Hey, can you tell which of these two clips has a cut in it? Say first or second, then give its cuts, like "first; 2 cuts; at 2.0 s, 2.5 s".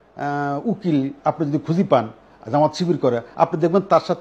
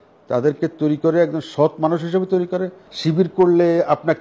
second; 1 cut; at 2.8 s